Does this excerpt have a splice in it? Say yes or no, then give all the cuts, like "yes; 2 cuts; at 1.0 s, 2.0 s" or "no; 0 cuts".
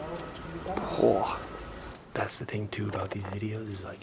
yes; 1 cut; at 1.9 s